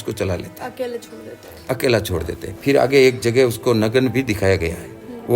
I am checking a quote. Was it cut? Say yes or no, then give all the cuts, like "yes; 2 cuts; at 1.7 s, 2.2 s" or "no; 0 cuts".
yes; 1 cut; at 2.5 s